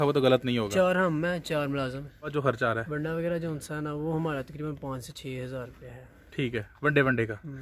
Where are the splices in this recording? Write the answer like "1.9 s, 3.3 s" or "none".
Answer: 2.4 s